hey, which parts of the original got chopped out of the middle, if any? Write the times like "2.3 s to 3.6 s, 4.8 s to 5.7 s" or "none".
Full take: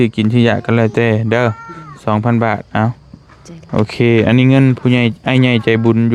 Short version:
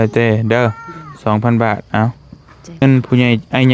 3.6 s to 4.5 s